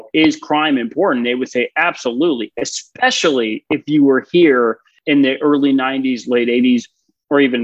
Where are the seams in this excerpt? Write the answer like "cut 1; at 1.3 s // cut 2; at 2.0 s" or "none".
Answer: cut 1; at 4.9 s